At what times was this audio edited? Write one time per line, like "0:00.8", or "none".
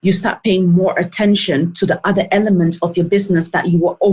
none